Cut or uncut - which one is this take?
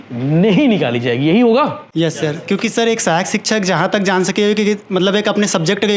uncut